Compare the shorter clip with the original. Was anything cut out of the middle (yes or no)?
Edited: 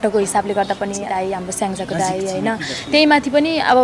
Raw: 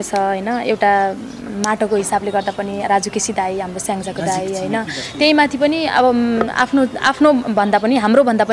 yes